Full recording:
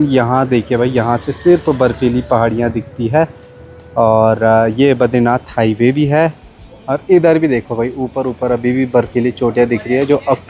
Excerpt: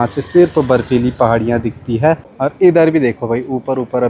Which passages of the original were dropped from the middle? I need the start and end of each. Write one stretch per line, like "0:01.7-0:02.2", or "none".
0:03.4-0:06.8